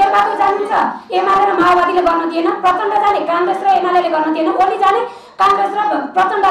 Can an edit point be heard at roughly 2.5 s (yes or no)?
no